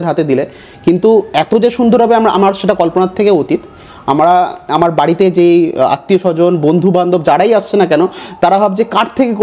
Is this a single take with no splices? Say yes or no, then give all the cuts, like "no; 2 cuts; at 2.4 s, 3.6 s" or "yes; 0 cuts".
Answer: yes; 0 cuts